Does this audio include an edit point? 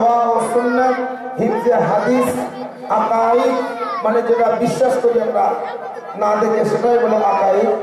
no; 0 cuts

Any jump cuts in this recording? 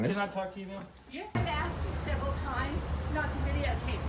yes; 1 cut; at 1.4 s

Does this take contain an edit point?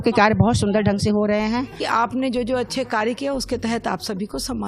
yes; 1 cut; at 1.8 s

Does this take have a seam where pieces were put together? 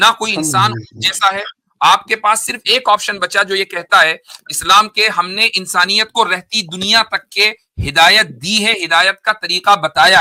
no; 0 cuts

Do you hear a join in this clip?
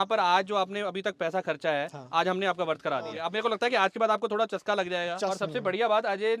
yes; 2 cuts; at 3.2 s, 5.2 s

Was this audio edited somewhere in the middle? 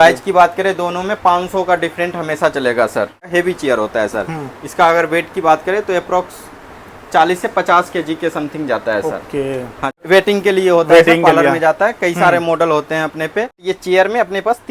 yes; 3 cuts; at 3.3 s, 10.0 s, 13.5 s

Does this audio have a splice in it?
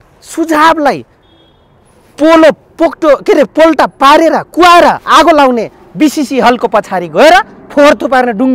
no; 0 cuts

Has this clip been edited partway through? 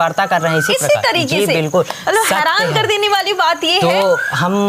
no; 0 cuts

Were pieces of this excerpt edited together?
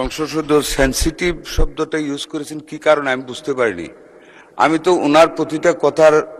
no; 0 cuts

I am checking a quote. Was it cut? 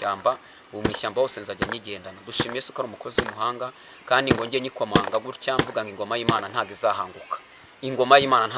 no; 0 cuts

